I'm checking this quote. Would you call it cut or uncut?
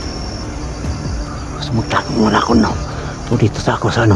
cut